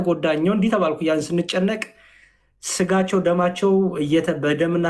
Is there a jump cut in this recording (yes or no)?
no